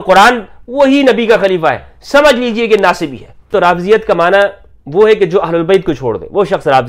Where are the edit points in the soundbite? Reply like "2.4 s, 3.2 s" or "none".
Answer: 3.5 s